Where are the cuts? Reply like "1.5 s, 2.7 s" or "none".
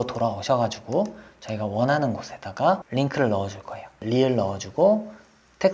2.8 s, 4.0 s